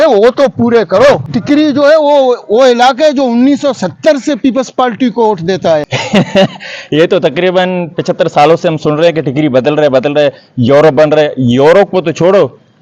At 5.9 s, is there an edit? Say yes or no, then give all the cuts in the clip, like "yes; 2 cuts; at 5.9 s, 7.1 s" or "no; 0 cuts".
yes; 2 cuts; at 1.3 s, 5.9 s